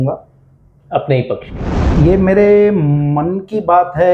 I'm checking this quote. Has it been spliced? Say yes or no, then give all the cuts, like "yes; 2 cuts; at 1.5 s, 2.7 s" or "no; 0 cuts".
yes; 1 cut; at 1.5 s